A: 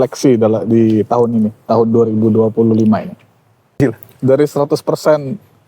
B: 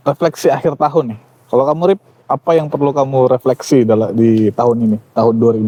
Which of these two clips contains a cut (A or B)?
A